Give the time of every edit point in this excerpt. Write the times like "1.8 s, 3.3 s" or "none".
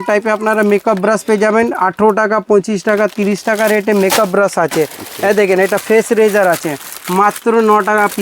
none